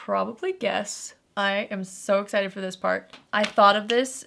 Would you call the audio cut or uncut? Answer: cut